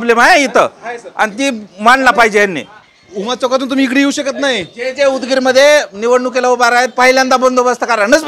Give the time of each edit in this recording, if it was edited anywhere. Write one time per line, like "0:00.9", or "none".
none